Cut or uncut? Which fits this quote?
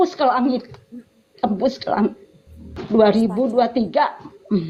uncut